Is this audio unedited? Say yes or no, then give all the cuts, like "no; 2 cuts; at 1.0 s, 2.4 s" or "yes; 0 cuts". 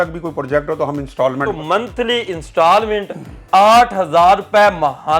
no; 1 cut; at 1.5 s